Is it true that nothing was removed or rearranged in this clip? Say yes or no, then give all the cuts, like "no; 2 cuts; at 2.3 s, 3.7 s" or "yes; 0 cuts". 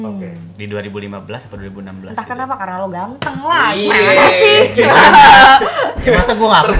yes; 0 cuts